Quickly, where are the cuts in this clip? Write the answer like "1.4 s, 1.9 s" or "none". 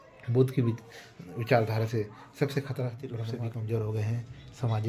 3.2 s